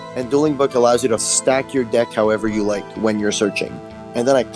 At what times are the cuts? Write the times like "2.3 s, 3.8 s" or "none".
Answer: 1.2 s